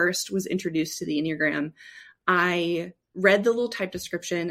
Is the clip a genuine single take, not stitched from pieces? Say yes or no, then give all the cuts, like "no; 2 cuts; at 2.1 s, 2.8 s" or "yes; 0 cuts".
yes; 0 cuts